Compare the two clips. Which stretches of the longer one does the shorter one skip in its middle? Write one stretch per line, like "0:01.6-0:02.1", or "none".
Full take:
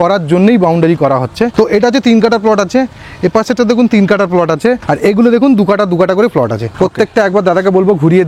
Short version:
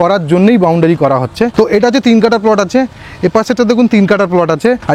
none

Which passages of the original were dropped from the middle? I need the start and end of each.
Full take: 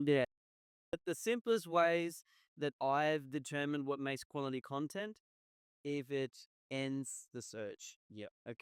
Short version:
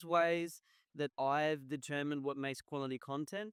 none

